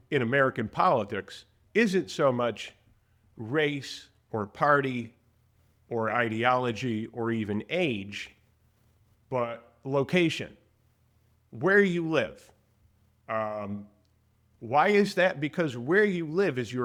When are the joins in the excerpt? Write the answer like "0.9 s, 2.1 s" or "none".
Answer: none